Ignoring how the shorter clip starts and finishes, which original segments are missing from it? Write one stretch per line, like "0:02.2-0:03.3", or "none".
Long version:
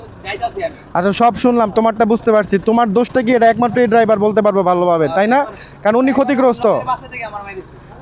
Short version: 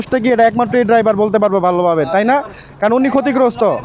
none